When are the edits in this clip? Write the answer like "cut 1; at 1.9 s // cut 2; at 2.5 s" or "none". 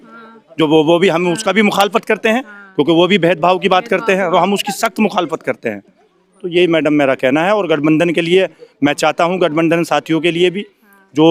none